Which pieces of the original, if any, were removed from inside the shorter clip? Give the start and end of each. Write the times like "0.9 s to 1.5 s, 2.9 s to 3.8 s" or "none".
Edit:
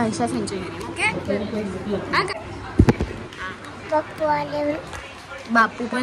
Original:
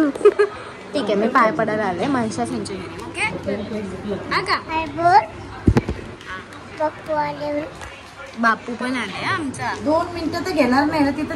4.6 s to 5.3 s